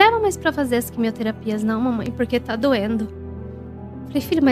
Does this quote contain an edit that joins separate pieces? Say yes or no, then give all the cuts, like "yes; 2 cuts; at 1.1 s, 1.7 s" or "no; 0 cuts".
no; 0 cuts